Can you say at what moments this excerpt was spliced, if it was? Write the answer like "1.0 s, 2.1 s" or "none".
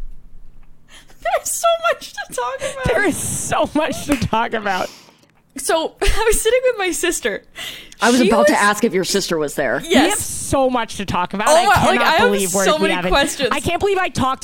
5.2 s